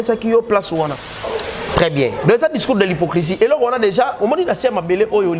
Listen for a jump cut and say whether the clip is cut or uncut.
cut